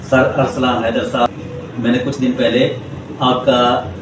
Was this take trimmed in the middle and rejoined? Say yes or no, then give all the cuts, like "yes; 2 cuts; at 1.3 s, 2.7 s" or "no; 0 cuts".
yes; 1 cut; at 1.3 s